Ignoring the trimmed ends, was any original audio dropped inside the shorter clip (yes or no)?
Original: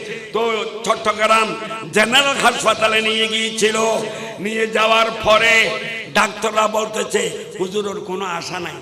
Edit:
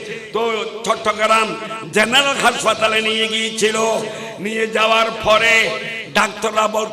no